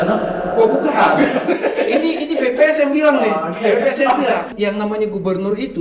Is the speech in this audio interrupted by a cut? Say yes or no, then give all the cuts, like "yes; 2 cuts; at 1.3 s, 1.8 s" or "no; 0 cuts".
yes; 1 cut; at 4.5 s